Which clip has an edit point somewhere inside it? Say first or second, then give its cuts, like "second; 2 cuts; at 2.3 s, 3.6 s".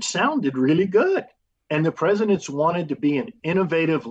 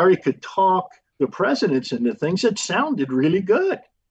second; 1 cut; at 1.0 s